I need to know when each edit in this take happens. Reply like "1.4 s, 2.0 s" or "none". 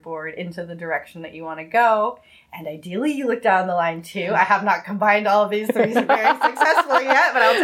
none

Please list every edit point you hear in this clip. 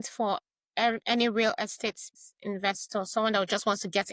2.1 s

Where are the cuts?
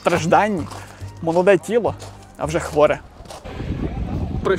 3.5 s

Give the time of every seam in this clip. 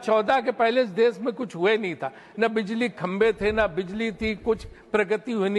none

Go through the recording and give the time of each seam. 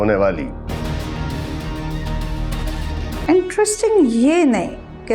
3.2 s

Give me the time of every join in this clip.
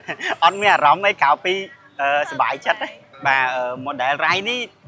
none

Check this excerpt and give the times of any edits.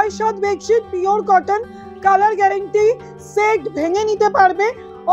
none

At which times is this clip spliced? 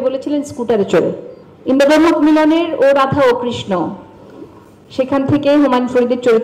1.5 s

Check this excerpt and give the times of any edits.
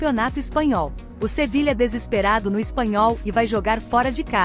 none

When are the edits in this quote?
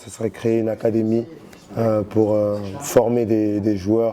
none

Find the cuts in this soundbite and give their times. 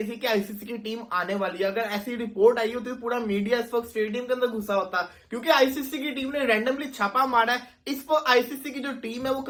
none

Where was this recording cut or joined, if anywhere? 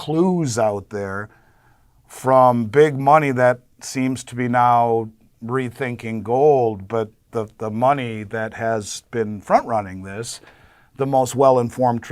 none

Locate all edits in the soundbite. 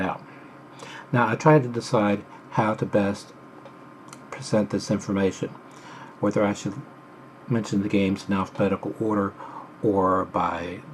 7.0 s

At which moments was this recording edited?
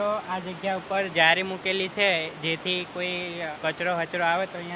3.5 s

